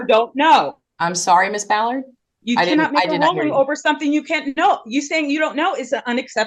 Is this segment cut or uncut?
uncut